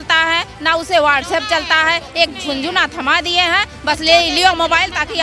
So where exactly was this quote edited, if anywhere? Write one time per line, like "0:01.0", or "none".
none